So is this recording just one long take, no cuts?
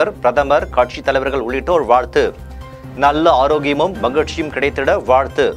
yes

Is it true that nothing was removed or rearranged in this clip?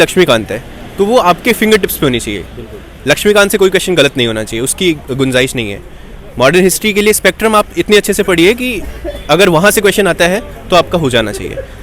yes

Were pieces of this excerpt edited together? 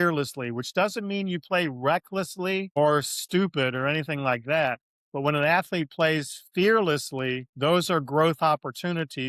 no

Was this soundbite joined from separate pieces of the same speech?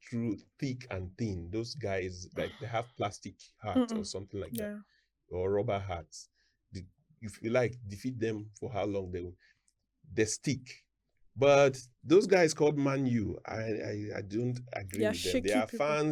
no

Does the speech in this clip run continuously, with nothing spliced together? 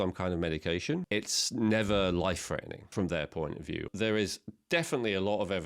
no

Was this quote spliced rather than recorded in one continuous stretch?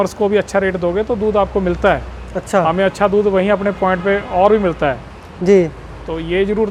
no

